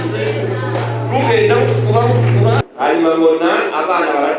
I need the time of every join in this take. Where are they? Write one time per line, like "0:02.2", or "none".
0:02.7